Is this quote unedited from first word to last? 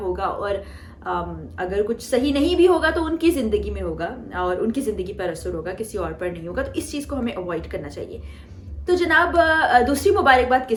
yes; 0 cuts

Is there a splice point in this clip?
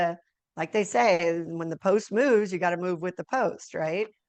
no; 0 cuts

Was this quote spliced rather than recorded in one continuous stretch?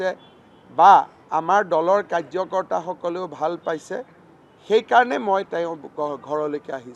no; 0 cuts

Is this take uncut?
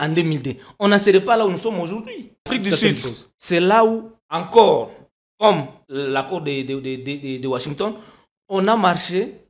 no; 1 cut; at 2.5 s

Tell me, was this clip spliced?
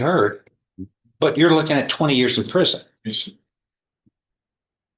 no; 0 cuts

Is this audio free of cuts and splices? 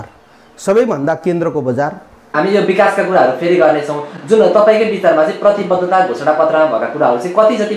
no; 1 cut; at 2.3 s

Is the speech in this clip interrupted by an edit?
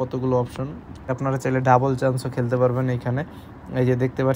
yes; 1 cut; at 1.1 s

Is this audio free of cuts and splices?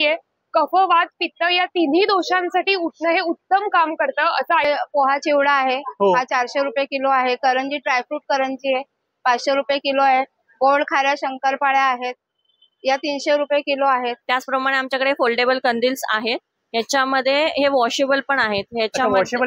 no; 2 cuts; at 4.6 s, 14.2 s

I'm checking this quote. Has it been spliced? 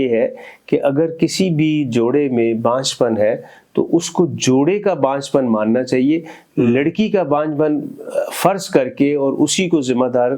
no; 0 cuts

